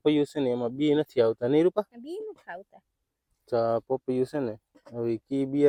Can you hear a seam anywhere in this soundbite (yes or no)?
no